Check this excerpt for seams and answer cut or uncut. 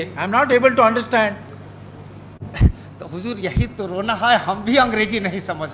uncut